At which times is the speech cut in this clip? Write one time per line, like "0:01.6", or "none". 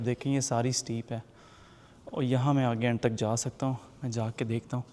none